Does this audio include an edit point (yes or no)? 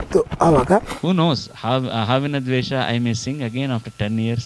yes